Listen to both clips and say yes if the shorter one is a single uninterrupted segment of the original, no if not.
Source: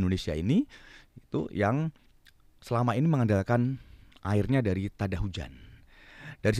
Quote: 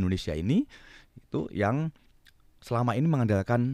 yes